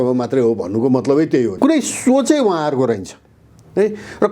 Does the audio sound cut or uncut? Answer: cut